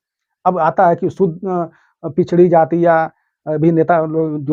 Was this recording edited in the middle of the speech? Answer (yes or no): no